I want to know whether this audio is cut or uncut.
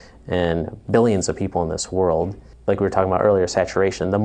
cut